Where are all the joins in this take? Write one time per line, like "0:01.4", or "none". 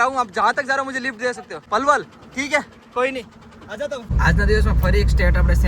0:01.5
0:04.1